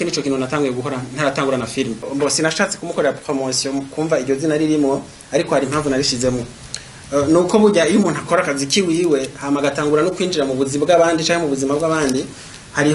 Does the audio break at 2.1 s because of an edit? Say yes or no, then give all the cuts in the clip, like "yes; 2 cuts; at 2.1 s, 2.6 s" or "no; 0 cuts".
yes; 1 cut; at 2.1 s